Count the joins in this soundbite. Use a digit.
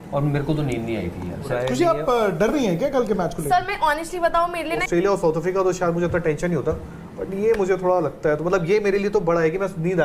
2